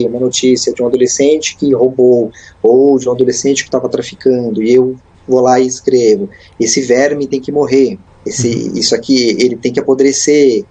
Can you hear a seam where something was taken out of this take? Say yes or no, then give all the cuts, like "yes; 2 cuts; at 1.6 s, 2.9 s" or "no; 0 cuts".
no; 0 cuts